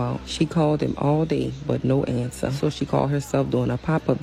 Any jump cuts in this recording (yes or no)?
no